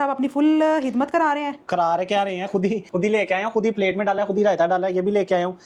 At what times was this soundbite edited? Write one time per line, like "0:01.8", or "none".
none